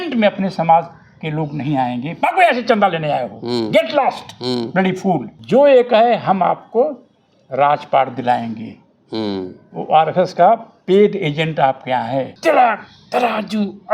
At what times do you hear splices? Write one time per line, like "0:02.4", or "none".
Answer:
0:05.3
0:12.3